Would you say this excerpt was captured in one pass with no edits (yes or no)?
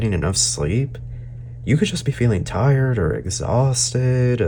yes